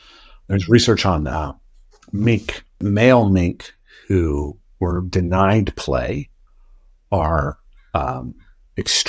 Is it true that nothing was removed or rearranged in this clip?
no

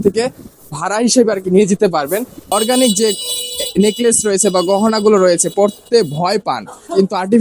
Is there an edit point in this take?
yes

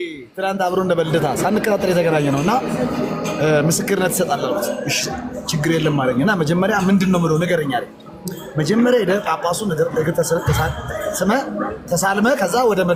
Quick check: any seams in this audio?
no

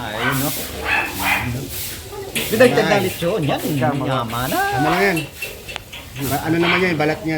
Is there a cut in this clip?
no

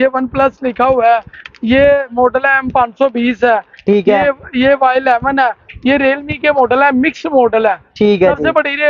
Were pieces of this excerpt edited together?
no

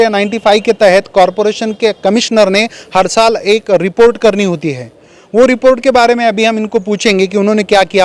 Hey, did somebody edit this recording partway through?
no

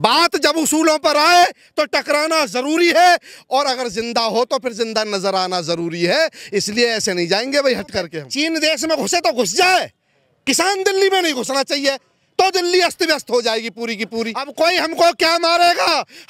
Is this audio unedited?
no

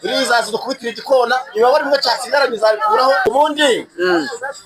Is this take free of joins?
no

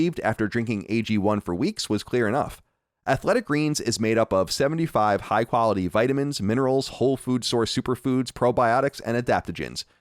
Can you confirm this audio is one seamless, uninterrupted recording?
yes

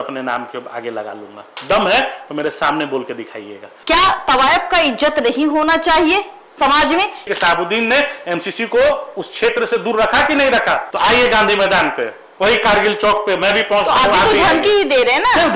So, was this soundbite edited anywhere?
yes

